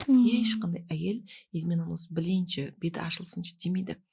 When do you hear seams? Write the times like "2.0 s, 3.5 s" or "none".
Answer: none